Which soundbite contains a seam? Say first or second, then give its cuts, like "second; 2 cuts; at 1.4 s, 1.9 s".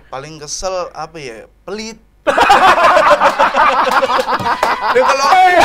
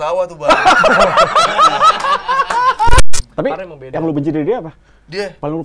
second; 1 cut; at 3.0 s